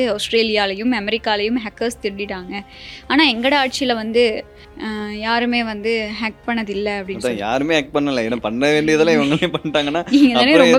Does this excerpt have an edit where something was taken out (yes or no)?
no